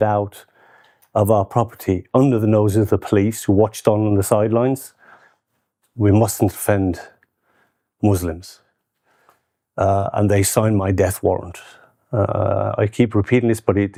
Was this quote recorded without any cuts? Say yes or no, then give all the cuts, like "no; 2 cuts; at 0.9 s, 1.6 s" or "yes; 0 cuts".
yes; 0 cuts